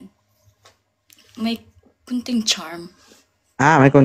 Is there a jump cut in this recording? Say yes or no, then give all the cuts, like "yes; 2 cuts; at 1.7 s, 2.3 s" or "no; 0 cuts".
no; 0 cuts